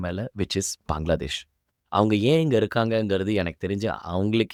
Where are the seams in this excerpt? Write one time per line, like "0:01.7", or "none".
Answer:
none

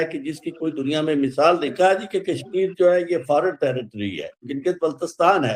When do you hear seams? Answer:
0:01.7
0:04.5

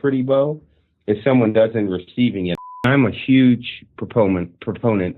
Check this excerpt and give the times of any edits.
0:02.9

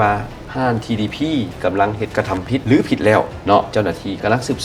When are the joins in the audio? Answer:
0:03.7

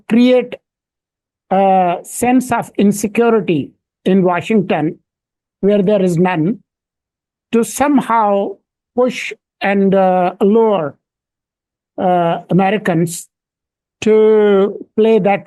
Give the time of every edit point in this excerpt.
none

